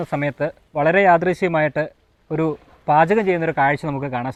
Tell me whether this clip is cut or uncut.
uncut